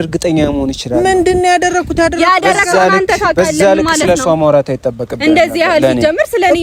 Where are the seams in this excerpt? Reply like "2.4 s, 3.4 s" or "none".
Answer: none